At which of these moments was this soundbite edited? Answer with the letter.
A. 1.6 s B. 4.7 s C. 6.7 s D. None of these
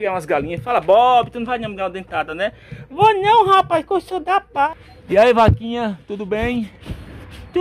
B